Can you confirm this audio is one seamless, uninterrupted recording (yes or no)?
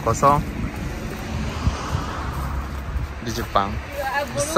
yes